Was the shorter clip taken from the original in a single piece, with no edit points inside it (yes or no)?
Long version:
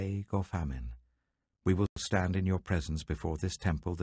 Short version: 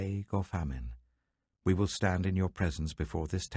no